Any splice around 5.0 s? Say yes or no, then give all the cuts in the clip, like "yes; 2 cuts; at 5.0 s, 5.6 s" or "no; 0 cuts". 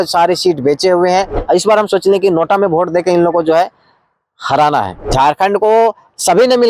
yes; 2 cuts; at 1.4 s, 5.0 s